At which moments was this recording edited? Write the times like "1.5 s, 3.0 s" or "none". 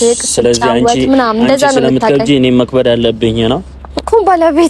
none